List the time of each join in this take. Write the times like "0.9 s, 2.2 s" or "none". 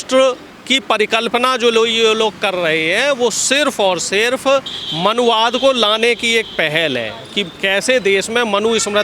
none